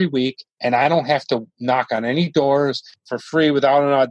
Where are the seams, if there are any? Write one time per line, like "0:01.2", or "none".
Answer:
none